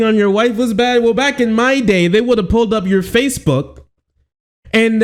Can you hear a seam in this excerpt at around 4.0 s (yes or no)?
no